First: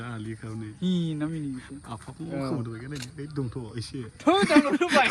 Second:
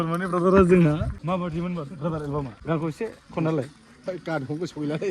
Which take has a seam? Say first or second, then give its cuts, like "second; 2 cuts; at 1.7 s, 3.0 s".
second; 2 cuts; at 1.1 s, 2.5 s